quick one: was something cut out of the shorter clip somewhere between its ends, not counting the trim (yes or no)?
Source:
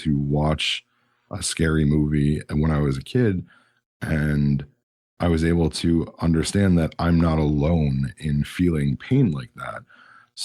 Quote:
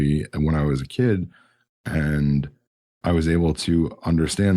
no